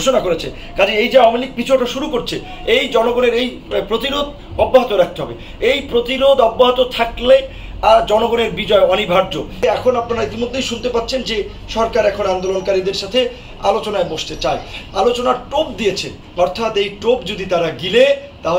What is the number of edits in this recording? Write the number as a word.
one